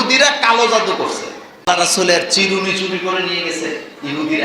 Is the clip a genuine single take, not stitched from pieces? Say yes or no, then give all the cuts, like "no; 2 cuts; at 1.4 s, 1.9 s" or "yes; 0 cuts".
no; 1 cut; at 1.7 s